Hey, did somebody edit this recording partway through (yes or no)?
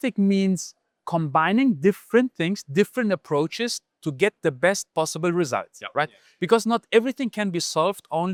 no